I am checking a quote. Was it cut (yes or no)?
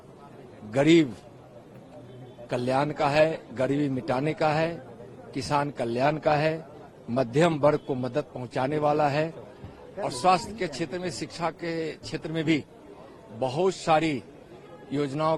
no